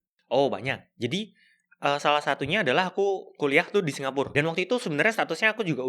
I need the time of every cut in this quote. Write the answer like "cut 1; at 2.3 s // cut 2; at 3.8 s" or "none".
cut 1; at 4.3 s

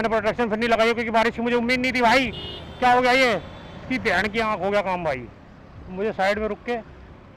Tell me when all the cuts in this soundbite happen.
none

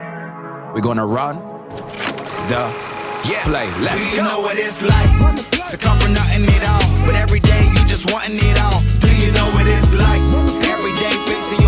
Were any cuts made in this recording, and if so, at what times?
none

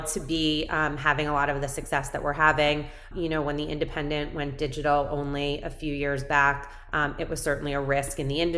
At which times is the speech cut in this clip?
cut 1; at 3.1 s

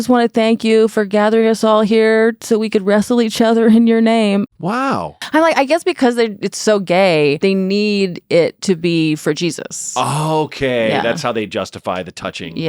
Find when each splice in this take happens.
cut 1; at 4.5 s // cut 2; at 7.4 s

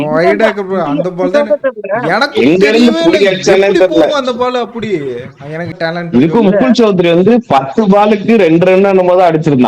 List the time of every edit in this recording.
cut 1; at 5.7 s

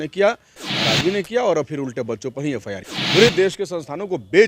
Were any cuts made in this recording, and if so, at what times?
cut 1; at 2.9 s

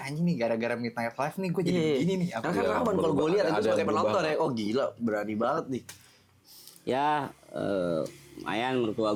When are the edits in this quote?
none

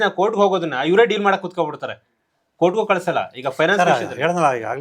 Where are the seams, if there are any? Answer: none

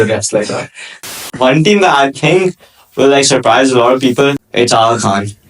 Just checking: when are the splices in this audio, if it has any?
cut 1; at 1.1 s // cut 2; at 4.4 s

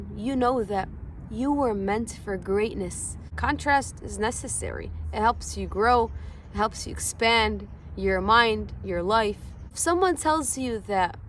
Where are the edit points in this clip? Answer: cut 1; at 3.3 s // cut 2; at 9.7 s

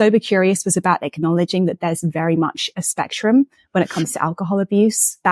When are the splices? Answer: none

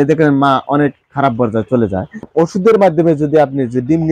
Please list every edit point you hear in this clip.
cut 1; at 2.3 s

